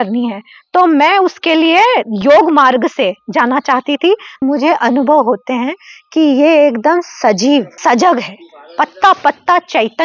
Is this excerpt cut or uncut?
cut